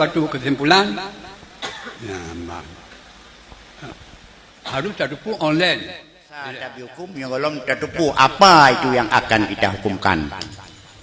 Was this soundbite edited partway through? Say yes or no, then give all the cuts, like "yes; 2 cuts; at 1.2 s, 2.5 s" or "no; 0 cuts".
yes; 1 cut; at 6.5 s